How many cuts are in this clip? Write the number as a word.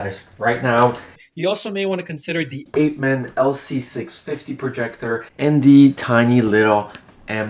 one